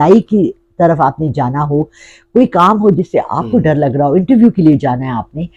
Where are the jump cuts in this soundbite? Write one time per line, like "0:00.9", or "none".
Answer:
none